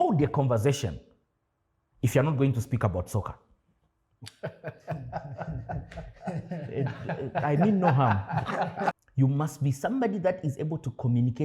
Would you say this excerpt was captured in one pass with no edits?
no; 1 cut; at 9.0 s

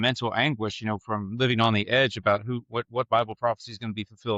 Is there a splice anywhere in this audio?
no; 0 cuts

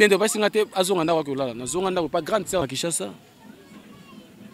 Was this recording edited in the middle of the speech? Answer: yes; 1 cut; at 2.6 s

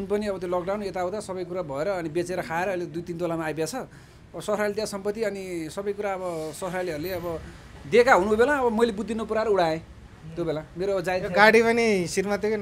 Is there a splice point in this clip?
no; 0 cuts

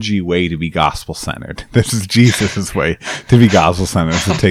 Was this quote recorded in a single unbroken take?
yes; 0 cuts

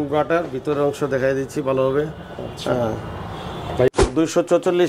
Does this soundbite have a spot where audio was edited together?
yes; 1 cut; at 3.9 s

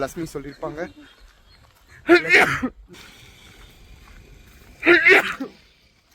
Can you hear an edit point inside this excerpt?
yes; 1 cut; at 2.9 s

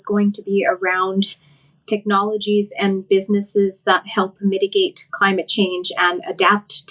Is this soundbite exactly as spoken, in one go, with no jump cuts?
yes; 0 cuts

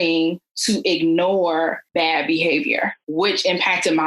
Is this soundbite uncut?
no; 2 cuts; at 1.8 s, 3.0 s

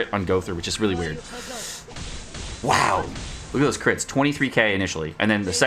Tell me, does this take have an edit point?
no; 0 cuts

